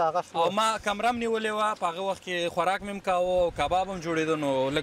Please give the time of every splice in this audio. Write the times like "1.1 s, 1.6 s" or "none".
none